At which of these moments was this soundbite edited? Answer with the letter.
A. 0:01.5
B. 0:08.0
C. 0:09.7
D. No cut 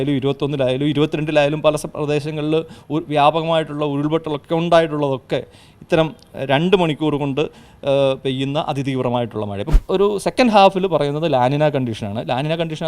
C